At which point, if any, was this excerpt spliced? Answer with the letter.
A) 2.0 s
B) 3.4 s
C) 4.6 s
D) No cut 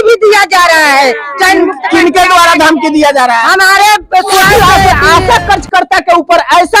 C